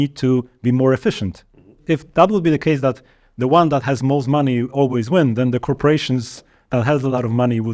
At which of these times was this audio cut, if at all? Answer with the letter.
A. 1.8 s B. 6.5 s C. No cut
A